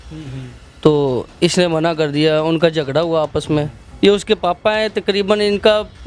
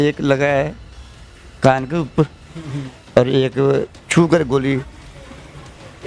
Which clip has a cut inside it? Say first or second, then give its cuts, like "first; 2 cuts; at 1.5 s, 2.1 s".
first; 1 cut; at 3.8 s